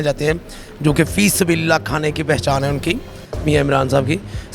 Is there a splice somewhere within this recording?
no; 0 cuts

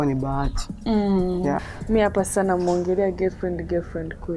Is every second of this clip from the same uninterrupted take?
no; 1 cut; at 1.6 s

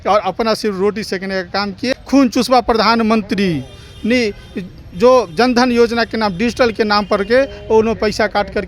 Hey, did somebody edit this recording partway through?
yes; 1 cut; at 1.9 s

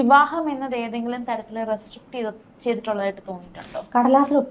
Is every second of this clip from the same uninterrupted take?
yes; 0 cuts

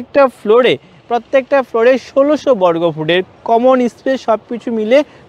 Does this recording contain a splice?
no; 0 cuts

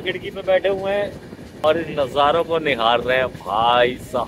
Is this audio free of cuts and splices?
no; 1 cut; at 1.6 s

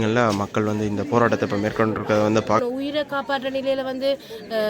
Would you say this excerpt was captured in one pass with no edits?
no; 1 cut; at 2.6 s

